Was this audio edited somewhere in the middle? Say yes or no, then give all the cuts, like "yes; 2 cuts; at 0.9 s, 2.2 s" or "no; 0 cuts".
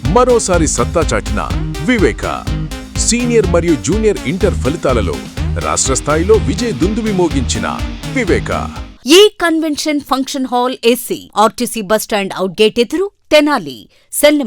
yes; 1 cut; at 8.9 s